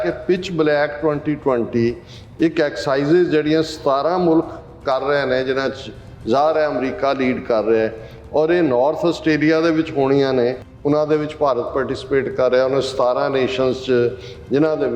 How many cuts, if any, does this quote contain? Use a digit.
1